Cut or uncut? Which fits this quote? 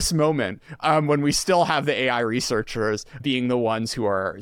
cut